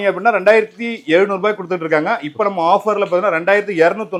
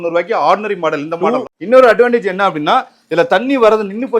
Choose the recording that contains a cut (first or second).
second